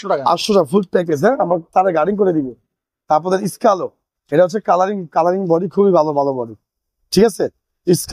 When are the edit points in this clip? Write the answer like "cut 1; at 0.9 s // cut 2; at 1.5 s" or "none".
none